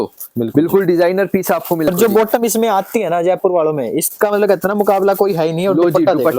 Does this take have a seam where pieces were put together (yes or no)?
yes